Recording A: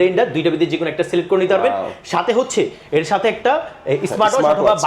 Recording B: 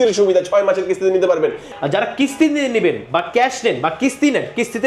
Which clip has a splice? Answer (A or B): B